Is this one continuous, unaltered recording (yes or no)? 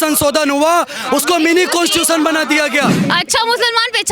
no